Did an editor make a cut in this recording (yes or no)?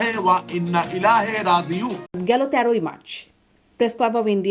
yes